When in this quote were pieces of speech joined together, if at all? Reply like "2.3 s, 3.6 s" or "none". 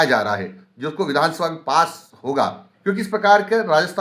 2.7 s